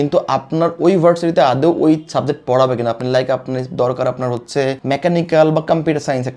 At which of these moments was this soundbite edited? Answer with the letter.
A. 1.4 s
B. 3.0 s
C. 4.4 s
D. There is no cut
D